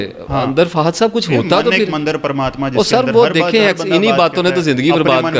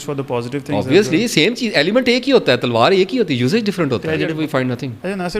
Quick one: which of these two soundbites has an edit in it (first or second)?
second